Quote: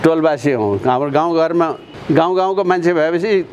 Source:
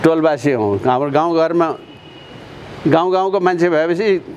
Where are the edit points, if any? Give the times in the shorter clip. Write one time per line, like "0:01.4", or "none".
0:01.9